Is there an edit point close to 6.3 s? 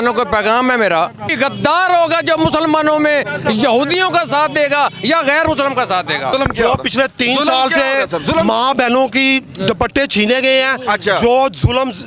yes; 2 cuts; at 1.2 s, 6.3 s

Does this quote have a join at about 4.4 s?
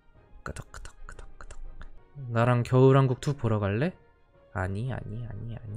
no; 1 cut; at 2.0 s

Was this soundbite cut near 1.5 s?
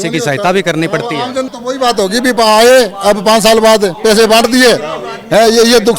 yes; 1 cut; at 1.5 s

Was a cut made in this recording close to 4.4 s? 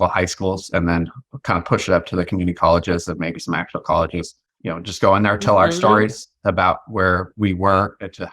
yes; 1 cut; at 4.4 s

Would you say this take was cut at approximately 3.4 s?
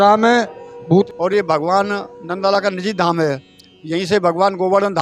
no; 1 cut; at 1.0 s

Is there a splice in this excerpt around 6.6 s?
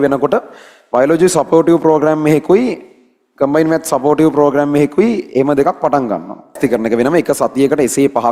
yes; 1 cut; at 6.6 s

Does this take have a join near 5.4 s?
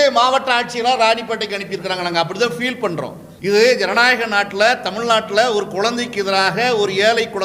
no; 1 cut; at 3.2 s

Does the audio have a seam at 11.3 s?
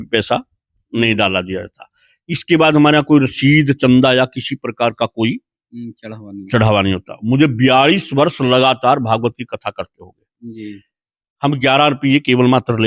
no; 0 cuts

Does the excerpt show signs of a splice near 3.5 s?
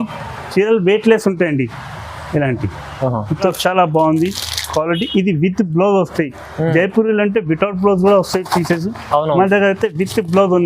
yes; 1 cut; at 3.5 s

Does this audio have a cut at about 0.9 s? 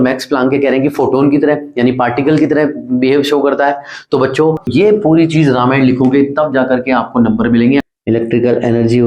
no; 2 cuts; at 4.7 s, 7.8 s

